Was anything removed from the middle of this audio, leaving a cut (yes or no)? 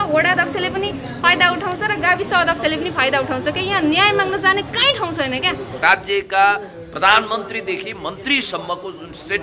yes